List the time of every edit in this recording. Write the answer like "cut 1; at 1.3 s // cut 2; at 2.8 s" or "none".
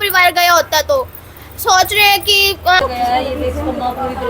cut 1; at 2.8 s